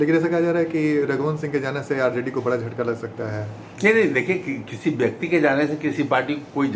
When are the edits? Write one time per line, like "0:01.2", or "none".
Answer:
none